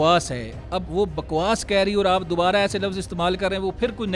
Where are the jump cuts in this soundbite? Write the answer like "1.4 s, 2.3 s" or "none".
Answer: none